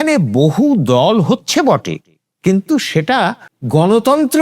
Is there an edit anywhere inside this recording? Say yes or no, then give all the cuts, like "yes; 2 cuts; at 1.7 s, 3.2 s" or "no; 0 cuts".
yes; 1 cut; at 3.5 s